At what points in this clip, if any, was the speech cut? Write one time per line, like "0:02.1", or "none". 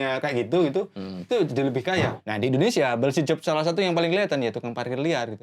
0:02.1